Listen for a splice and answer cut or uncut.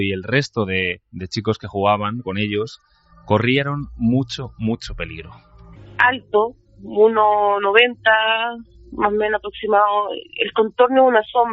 cut